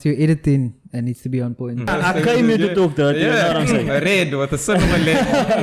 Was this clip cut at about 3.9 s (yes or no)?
no